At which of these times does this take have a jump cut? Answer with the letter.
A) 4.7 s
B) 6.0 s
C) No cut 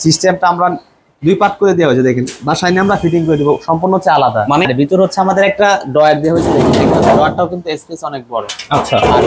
A